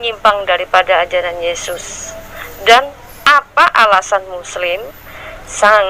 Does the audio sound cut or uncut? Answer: uncut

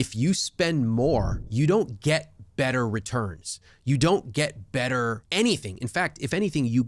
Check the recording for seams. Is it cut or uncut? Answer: cut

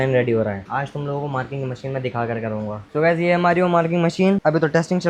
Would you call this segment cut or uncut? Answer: cut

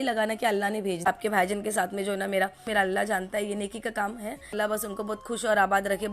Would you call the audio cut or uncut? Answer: cut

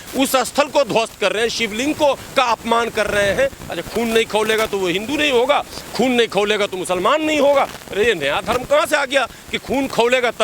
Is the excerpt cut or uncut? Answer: cut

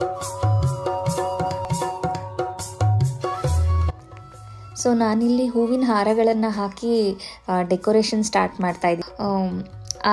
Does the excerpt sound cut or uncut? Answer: cut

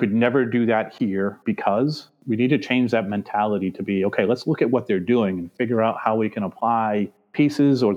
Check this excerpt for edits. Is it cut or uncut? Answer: uncut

